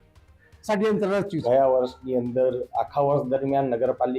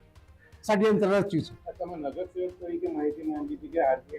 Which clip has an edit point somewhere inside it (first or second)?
first